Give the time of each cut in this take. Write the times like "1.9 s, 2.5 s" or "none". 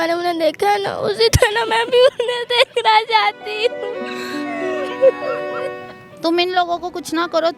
6.1 s